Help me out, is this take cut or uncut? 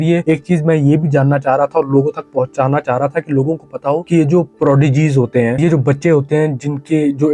uncut